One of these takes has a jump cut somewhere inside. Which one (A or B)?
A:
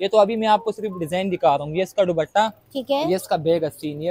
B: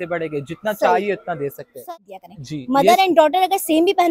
B